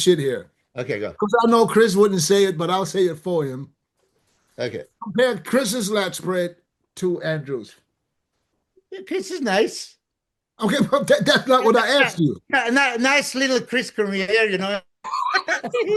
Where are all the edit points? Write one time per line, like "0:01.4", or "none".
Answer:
none